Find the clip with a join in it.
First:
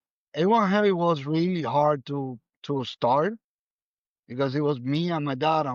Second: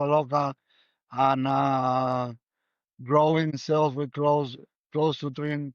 second; 1 cut; at 3.6 s

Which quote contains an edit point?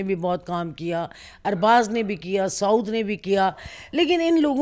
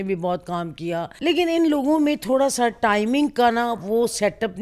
second; 1 cut; at 1.1 s

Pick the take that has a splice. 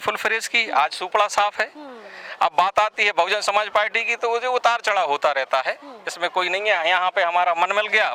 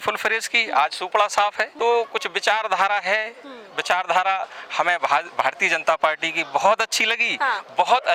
second; 1 cut; at 1.7 s

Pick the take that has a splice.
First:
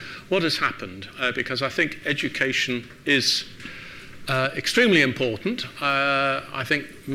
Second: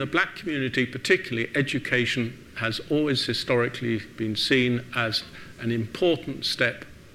second; 1 cut; at 5.9 s

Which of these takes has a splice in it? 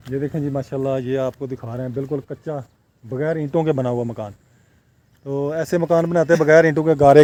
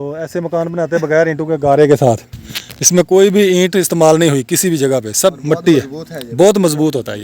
second; 1 cut; at 5.6 s

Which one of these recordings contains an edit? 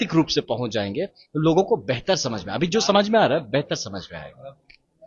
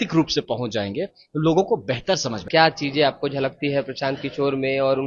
second; 1 cut; at 2.4 s

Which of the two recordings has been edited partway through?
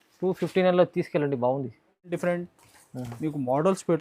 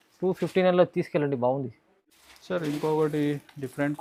first; 1 cut; at 2.1 s

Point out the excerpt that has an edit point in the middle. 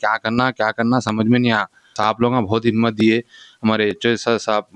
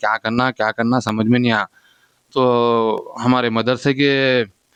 first; 1 cut; at 2.0 s

